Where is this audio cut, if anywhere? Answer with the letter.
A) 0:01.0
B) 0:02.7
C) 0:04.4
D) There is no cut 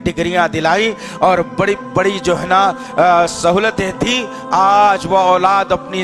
D